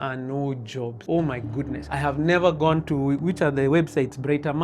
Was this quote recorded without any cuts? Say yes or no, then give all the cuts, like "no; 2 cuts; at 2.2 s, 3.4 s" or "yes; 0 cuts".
no; 2 cuts; at 1.0 s, 1.8 s